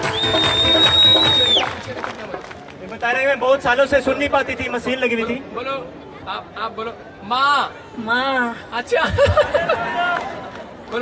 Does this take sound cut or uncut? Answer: uncut